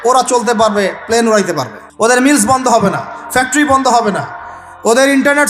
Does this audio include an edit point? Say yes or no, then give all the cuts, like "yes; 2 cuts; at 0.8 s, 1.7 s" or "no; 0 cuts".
yes; 1 cut; at 2.1 s